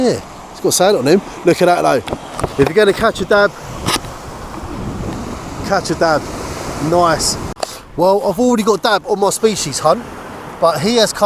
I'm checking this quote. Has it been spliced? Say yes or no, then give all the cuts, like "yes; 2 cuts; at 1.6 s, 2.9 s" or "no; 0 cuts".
yes; 1 cut; at 7.4 s